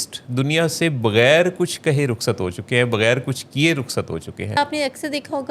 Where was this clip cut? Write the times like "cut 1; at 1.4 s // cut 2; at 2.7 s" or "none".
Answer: cut 1; at 4.6 s